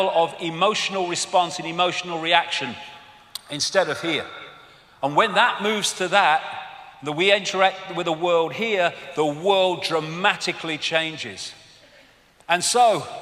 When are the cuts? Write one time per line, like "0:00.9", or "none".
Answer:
none